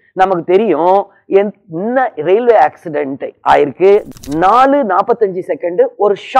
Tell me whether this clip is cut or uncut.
cut